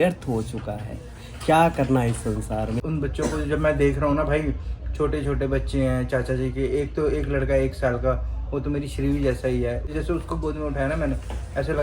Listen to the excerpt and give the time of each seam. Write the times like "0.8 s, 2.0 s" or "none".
2.8 s, 9.9 s